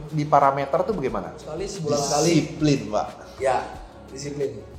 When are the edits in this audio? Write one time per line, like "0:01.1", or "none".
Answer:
0:01.7

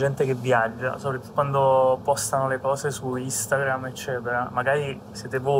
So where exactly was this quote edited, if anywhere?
0:01.3

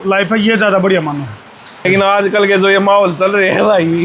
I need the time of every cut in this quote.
0:01.9

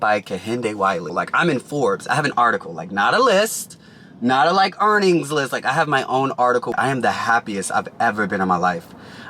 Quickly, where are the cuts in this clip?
0:01.1
0:06.7

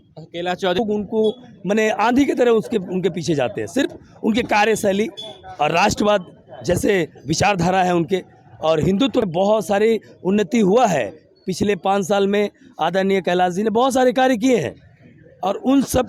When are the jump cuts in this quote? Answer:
0:00.8
0:09.2

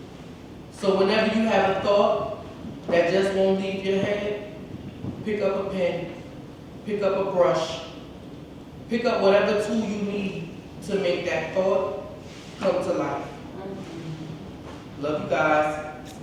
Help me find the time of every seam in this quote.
none

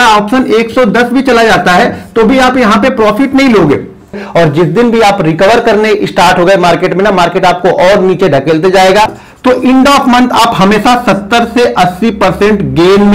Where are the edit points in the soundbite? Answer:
0:04.2
0:09.2

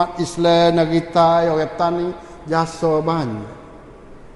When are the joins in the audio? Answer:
none

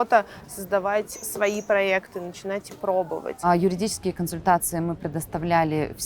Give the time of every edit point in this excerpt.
0:03.4

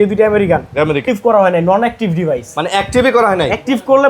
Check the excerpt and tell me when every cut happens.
0:01.0

